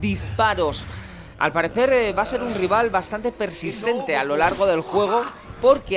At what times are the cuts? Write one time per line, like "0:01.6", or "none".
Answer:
none